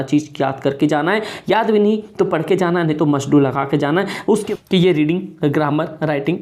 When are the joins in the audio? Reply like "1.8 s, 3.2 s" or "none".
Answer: 4.4 s